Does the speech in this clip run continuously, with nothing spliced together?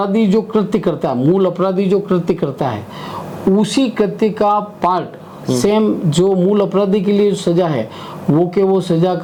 yes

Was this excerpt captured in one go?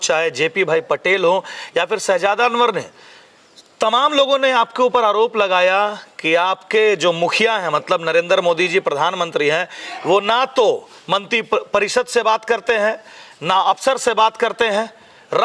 yes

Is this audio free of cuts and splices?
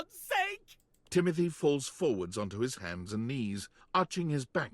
no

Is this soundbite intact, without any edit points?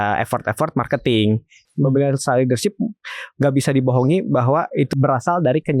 no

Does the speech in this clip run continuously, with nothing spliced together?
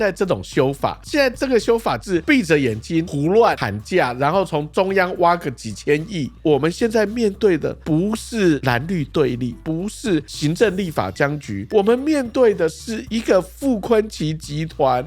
no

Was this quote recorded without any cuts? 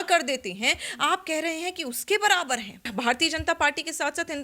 no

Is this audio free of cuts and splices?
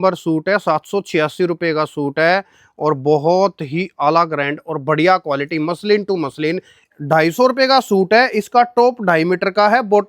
no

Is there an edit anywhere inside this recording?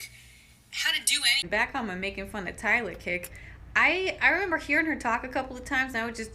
yes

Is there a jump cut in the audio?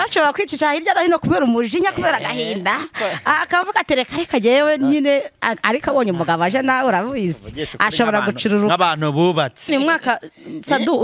yes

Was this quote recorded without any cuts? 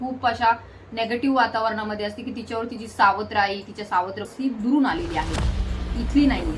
no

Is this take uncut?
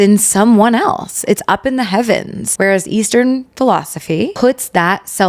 no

